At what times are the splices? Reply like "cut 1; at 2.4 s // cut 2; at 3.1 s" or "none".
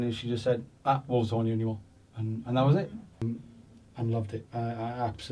cut 1; at 3.2 s